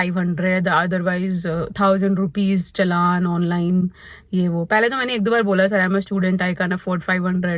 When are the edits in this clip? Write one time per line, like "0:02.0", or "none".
none